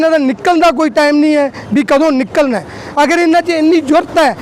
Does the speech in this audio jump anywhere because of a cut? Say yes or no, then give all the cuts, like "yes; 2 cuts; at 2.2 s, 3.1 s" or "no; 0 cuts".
no; 0 cuts